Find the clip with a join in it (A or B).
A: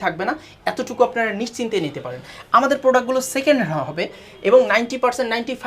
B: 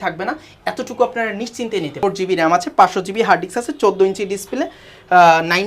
B